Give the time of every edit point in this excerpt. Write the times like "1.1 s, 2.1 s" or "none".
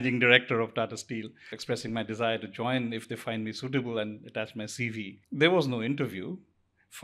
1.5 s, 5.2 s